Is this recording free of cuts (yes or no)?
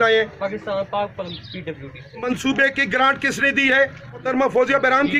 no